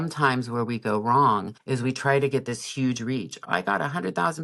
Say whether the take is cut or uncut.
cut